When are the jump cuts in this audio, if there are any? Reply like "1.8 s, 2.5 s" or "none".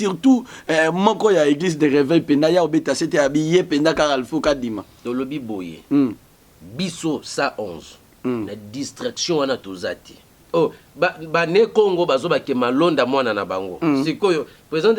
10.3 s